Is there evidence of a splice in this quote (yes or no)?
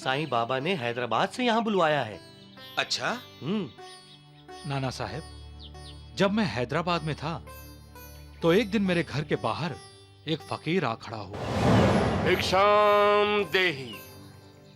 no